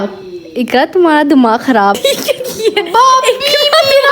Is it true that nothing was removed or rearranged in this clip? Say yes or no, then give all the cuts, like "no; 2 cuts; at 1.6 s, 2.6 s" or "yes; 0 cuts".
no; 1 cut; at 2.0 s